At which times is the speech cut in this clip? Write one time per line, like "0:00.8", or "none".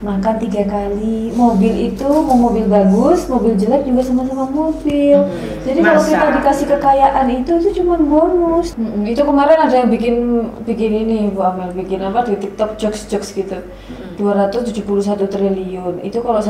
0:08.7